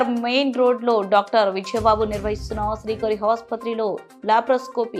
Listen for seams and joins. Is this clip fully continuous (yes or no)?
yes